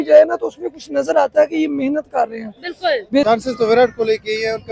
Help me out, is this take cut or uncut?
cut